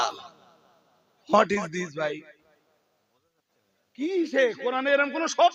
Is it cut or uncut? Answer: uncut